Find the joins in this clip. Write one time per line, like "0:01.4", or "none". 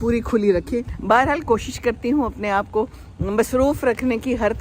0:00.9